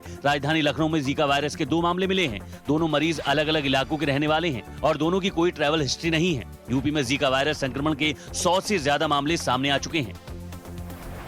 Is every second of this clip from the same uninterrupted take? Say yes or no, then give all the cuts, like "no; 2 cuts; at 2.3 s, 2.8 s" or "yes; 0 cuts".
yes; 0 cuts